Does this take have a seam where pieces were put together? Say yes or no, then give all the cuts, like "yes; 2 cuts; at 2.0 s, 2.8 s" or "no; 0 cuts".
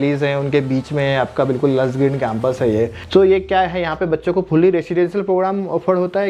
no; 0 cuts